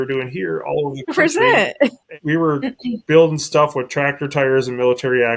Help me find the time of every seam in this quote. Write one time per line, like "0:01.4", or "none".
0:02.0